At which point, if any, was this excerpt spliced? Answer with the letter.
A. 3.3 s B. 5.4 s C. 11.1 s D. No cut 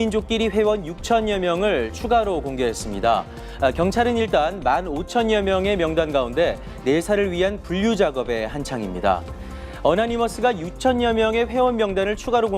C